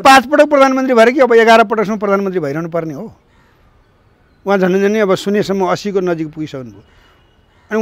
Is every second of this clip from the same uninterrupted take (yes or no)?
yes